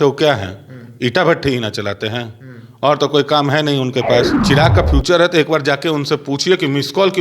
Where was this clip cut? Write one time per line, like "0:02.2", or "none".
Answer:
0:04.4